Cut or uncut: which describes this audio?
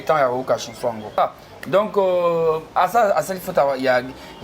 cut